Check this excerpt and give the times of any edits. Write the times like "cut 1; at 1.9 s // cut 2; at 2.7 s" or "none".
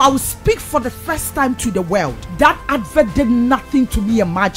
cut 1; at 2.2 s